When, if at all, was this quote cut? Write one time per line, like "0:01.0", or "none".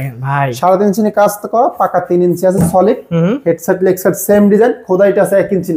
none